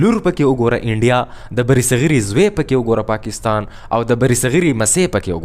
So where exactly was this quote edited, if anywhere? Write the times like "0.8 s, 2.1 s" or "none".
none